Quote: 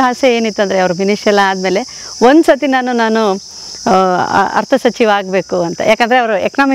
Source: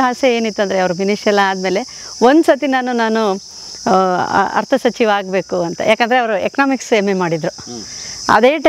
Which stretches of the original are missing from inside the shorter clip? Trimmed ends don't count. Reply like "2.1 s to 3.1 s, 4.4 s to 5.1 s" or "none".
none